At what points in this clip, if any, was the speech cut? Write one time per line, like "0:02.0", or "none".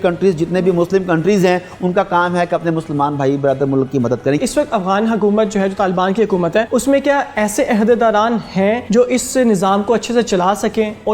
0:04.4
0:06.7
0:08.8